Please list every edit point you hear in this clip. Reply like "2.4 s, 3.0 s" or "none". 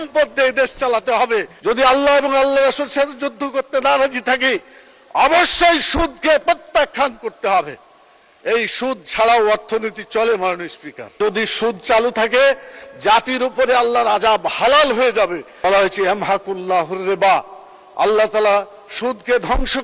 1.5 s, 11.2 s, 15.5 s